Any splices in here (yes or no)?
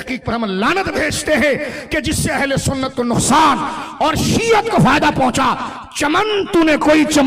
no